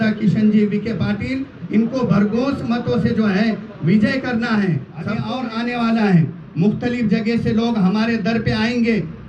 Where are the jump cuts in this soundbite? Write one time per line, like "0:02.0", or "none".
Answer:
0:05.2